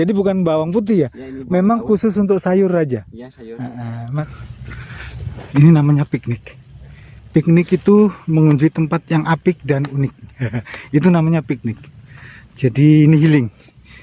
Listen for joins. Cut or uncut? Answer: cut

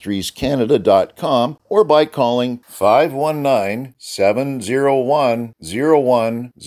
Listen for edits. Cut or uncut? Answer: cut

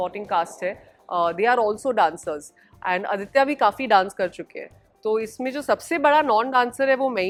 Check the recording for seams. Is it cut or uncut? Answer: uncut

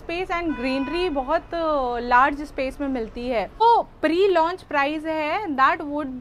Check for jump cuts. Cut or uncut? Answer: cut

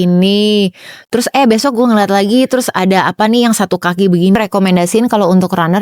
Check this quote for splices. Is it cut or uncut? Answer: cut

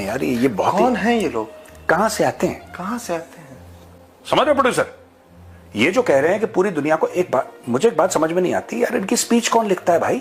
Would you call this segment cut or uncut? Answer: uncut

